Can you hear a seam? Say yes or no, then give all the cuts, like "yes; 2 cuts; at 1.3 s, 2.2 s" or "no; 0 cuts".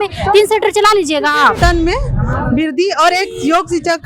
yes; 1 cut; at 1.6 s